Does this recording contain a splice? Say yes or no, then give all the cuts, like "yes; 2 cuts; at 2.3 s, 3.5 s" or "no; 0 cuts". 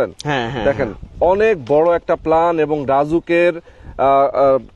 no; 0 cuts